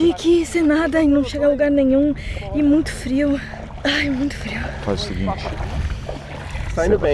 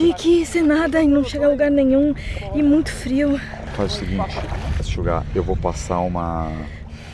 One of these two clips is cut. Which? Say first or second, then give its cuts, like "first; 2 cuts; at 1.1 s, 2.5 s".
second; 2 cuts; at 3.6 s, 4.9 s